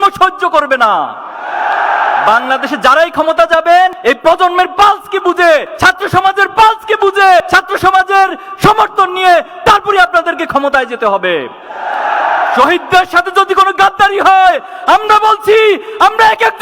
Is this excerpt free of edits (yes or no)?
yes